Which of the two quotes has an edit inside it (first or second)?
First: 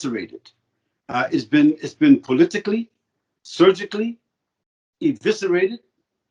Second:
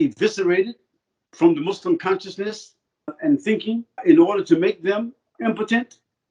second